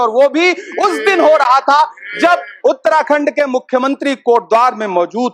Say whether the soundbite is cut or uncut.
uncut